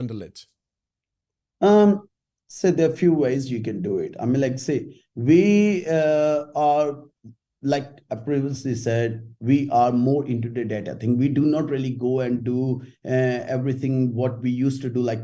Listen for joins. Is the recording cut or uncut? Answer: uncut